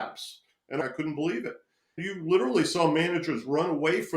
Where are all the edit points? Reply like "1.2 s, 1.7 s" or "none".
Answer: 0.8 s, 2.0 s